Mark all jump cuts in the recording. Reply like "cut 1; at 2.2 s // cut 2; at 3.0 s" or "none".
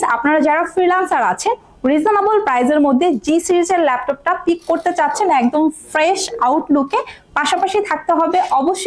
none